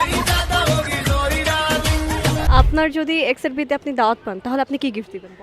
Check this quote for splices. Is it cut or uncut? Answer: cut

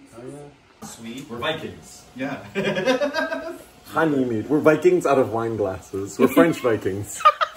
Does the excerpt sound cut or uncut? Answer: uncut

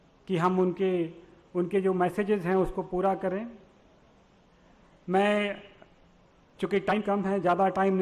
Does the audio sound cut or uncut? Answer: cut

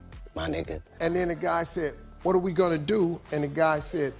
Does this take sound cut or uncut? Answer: cut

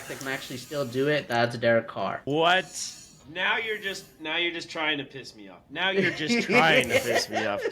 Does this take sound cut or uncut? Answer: cut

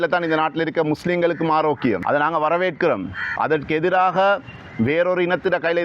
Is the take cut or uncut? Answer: cut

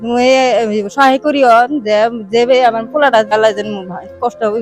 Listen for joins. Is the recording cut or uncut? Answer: cut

